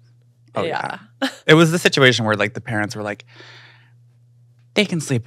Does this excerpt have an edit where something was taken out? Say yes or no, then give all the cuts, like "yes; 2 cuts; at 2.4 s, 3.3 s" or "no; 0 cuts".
no; 0 cuts